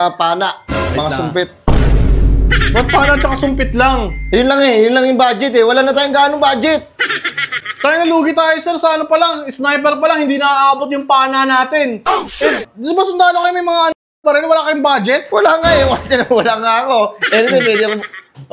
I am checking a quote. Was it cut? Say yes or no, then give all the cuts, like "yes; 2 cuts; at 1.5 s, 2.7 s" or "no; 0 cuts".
no; 0 cuts